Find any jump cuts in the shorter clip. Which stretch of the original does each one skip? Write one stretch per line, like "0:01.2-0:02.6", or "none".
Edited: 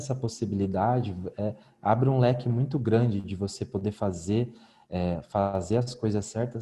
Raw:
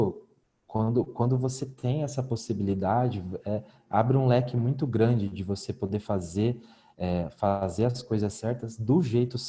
none